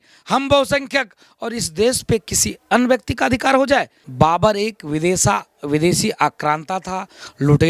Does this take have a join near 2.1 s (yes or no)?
no